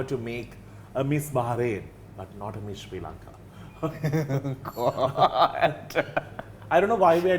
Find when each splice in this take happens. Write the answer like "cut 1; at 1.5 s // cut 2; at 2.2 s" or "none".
none